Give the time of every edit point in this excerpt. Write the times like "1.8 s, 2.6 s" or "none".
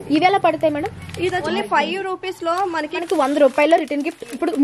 1.5 s, 3.0 s

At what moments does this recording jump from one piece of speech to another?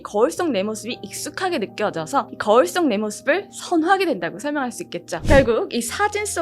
5.1 s

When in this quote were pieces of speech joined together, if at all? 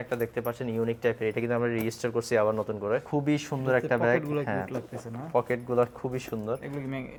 none

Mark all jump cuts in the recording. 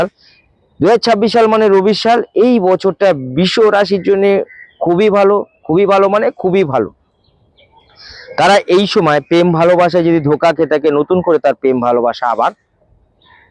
none

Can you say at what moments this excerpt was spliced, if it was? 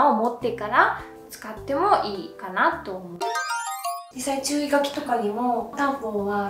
none

